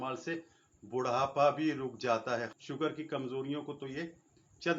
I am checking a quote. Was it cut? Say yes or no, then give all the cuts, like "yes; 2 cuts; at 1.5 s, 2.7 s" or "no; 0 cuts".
yes; 1 cut; at 2.5 s